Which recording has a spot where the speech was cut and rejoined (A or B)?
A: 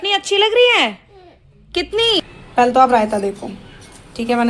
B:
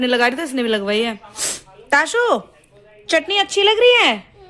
A